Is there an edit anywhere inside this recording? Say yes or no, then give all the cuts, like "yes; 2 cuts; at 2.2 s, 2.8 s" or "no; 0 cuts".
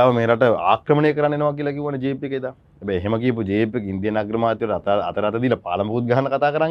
no; 0 cuts